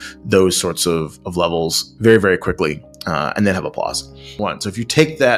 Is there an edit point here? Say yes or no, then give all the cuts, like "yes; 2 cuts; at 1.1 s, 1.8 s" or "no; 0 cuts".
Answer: no; 0 cuts